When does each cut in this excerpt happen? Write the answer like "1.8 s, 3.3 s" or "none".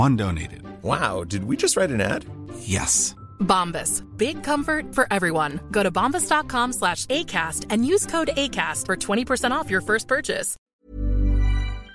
10.7 s

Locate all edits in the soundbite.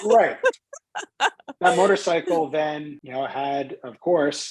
3.0 s

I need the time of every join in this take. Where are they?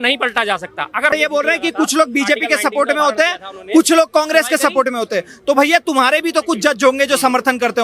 1.1 s

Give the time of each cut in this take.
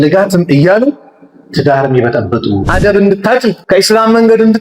2.7 s, 3.6 s

